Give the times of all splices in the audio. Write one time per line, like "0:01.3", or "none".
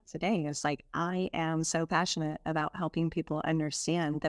none